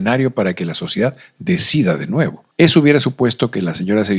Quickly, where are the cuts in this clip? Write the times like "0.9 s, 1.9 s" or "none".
2.4 s

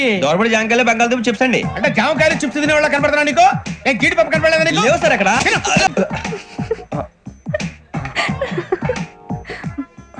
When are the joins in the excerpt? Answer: none

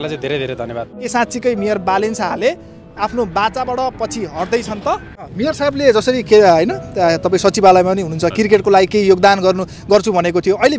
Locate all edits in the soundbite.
0.9 s, 5.1 s

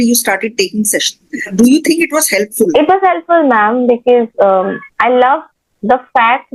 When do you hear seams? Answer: 1.5 s, 2.7 s

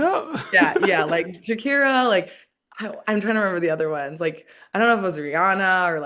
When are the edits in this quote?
none

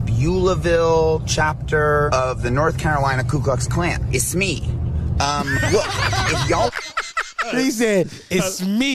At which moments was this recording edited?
2.1 s, 4.0 s, 7.5 s

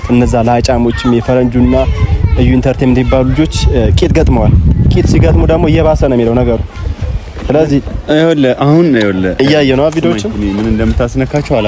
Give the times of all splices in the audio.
none

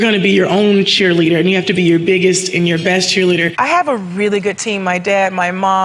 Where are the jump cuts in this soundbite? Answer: 3.5 s

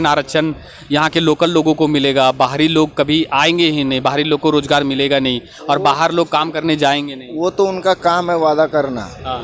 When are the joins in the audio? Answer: none

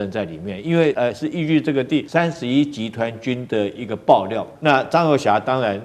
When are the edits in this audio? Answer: 0.9 s, 2.1 s, 4.5 s

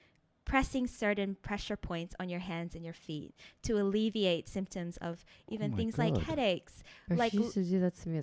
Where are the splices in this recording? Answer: none

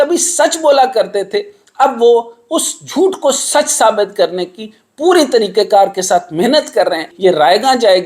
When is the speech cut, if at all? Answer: 7.1 s

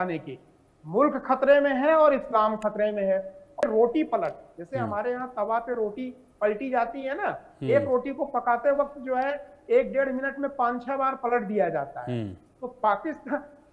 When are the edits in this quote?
3.6 s

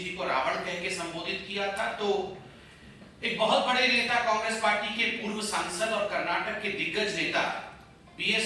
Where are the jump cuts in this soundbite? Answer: none

